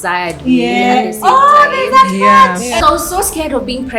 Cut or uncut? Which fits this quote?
cut